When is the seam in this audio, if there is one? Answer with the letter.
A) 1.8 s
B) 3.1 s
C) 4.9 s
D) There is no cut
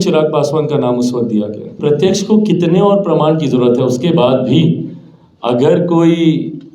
A